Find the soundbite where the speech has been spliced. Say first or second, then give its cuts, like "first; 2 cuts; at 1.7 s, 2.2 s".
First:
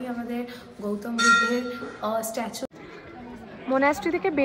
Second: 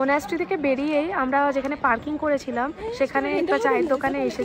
first; 1 cut; at 2.6 s